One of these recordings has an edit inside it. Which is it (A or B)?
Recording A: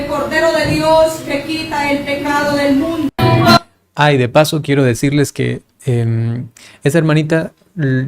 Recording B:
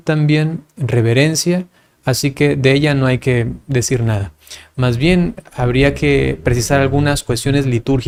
A